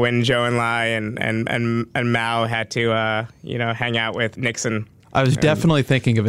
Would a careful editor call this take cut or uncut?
cut